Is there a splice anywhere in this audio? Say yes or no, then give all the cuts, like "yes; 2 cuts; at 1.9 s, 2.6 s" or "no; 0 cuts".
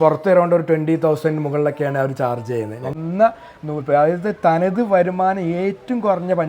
yes; 1 cut; at 2.9 s